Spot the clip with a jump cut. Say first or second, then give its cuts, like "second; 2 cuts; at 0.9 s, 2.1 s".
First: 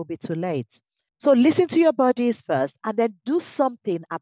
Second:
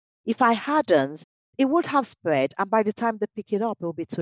second; 1 cut; at 1.5 s